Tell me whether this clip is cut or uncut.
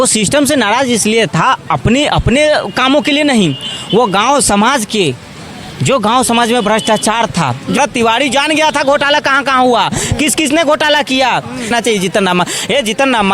cut